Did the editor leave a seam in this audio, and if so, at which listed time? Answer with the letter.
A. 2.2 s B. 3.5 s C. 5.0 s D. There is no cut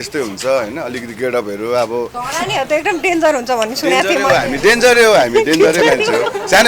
A